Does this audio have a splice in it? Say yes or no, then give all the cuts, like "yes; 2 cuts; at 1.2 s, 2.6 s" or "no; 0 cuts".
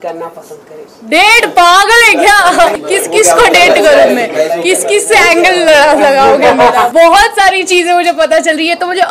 yes; 2 cuts; at 2.8 s, 6.9 s